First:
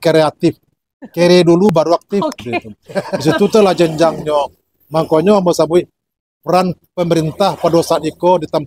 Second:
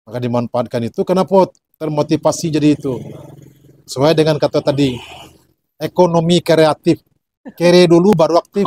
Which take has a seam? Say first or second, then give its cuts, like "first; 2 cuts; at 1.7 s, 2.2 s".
first; 1 cut; at 3.1 s